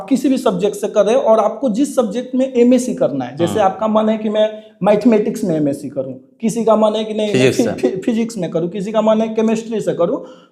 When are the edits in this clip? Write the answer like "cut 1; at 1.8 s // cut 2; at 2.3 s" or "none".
none